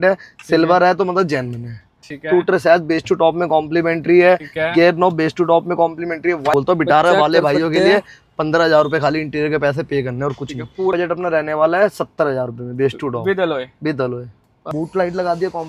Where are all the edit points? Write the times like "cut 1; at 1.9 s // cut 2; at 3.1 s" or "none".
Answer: cut 1; at 2.1 s // cut 2; at 6.4 s // cut 3; at 10.9 s // cut 4; at 14.5 s